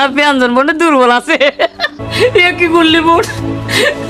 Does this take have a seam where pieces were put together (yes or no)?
yes